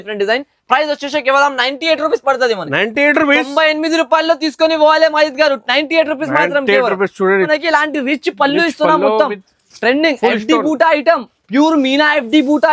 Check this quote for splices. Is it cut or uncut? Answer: cut